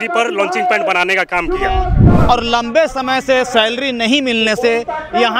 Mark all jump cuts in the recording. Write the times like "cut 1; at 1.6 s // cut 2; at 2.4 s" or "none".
cut 1; at 2.0 s